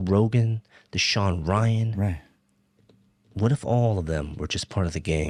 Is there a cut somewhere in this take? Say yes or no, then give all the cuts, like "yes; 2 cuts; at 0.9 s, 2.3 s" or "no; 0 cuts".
no; 0 cuts